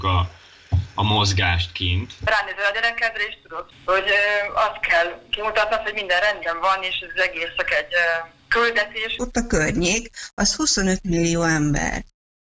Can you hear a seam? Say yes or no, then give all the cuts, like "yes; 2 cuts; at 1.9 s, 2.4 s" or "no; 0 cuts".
yes; 3 cuts; at 2.2 s, 3.7 s, 9.0 s